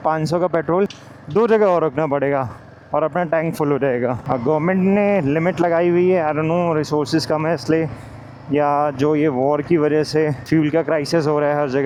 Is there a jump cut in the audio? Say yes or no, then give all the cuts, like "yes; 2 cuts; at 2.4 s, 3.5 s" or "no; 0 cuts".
no; 0 cuts